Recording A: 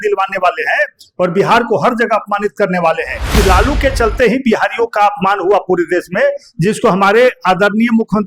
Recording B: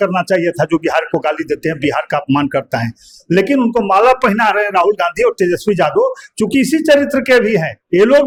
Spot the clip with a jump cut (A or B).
A